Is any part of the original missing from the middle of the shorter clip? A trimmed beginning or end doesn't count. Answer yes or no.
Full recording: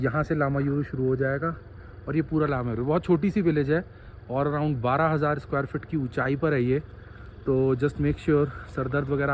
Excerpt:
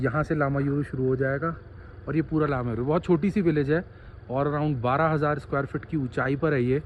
no